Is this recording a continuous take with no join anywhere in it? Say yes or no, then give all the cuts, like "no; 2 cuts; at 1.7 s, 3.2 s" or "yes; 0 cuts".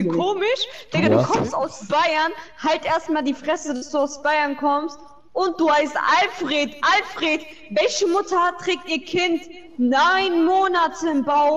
yes; 0 cuts